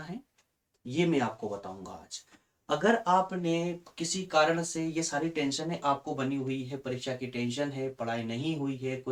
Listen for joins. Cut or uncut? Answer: uncut